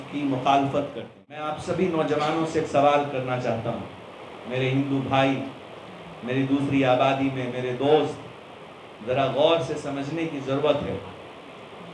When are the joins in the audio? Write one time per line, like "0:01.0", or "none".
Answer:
0:01.5